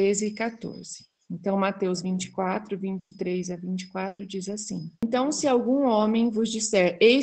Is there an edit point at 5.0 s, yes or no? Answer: yes